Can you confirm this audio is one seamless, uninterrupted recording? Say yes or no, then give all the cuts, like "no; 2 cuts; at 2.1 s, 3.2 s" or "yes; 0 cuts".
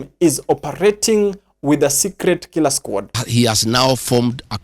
no; 1 cut; at 3.2 s